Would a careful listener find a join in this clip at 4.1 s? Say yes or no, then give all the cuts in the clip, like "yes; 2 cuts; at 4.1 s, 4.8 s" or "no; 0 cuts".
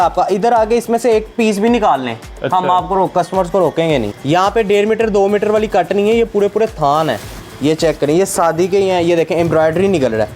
yes; 1 cut; at 4.1 s